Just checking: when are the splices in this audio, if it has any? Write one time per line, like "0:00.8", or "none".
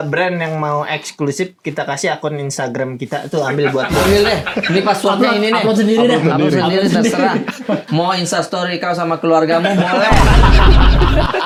none